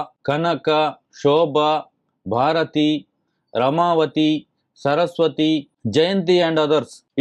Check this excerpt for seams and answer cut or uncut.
uncut